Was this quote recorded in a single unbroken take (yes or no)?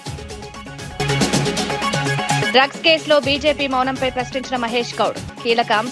yes